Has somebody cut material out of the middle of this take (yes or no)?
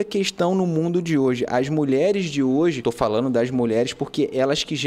yes